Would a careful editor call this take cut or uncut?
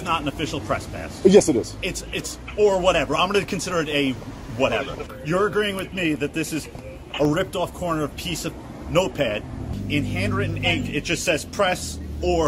cut